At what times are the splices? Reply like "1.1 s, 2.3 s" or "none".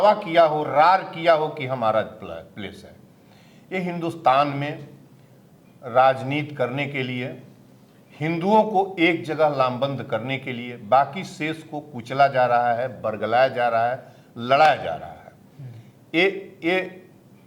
none

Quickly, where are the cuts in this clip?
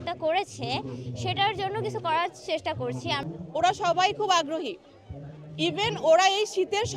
3.2 s

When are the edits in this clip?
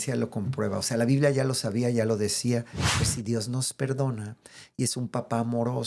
2.9 s

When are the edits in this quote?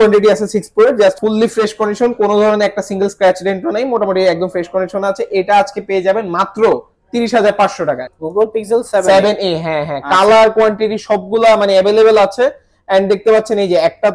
1.2 s, 8.1 s

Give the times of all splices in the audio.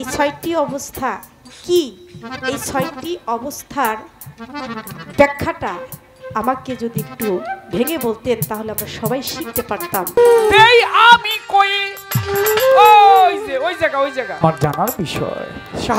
10.2 s, 14.4 s

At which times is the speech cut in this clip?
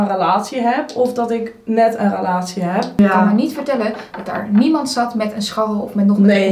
3.0 s

